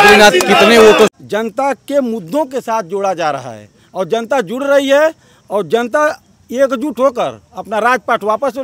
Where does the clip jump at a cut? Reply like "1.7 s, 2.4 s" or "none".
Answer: 1.1 s